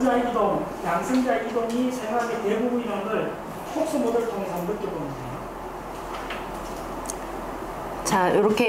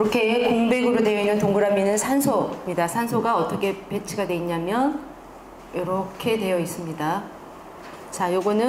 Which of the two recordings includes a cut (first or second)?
first